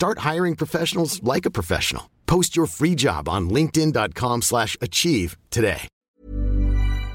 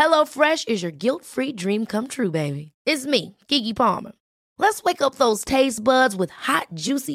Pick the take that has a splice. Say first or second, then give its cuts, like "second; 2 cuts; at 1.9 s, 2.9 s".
first; 1 cut; at 6.0 s